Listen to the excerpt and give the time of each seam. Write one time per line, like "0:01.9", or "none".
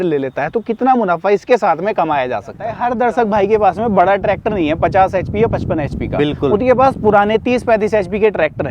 0:02.7